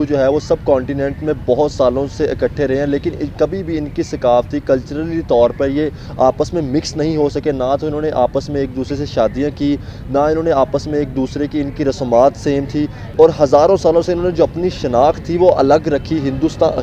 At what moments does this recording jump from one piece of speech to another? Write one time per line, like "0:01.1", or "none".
none